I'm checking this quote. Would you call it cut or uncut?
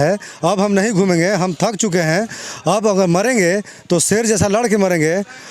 uncut